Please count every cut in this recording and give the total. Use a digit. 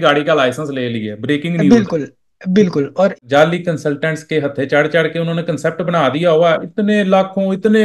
1